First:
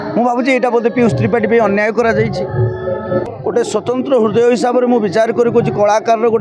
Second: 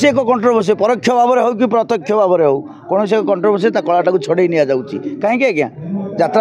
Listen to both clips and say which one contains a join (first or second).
first